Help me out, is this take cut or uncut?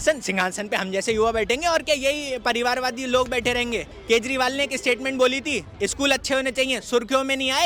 uncut